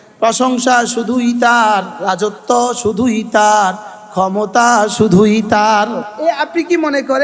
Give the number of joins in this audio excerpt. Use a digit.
2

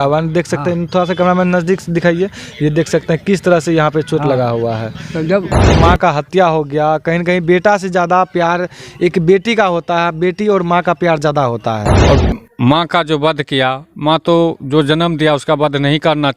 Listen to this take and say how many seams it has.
2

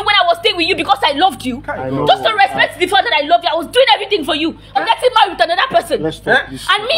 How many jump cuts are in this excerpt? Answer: 1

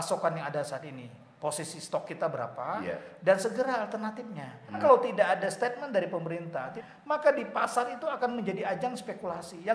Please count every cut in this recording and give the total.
2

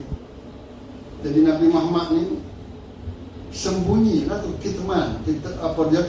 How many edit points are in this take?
0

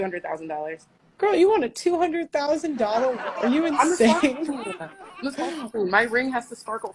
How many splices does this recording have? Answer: 0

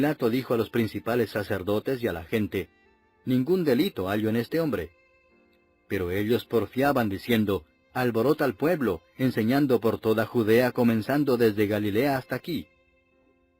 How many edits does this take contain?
1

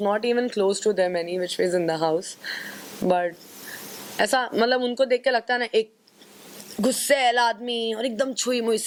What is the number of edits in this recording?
0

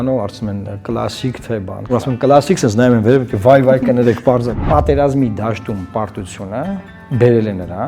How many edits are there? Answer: 3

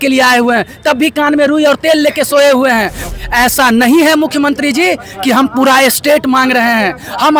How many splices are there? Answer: 1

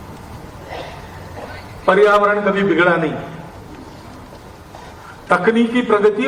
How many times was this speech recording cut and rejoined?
0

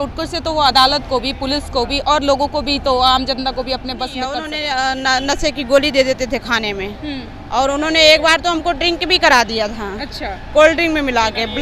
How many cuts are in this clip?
1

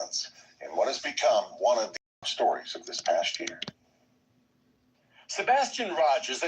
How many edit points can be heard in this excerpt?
1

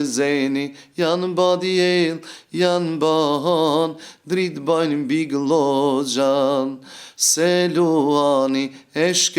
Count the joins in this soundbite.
0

